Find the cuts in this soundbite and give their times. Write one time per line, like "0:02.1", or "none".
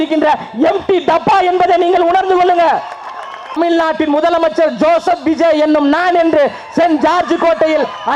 0:03.6